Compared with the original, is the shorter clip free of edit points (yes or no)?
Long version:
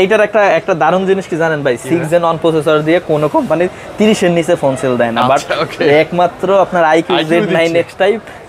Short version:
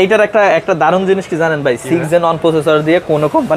yes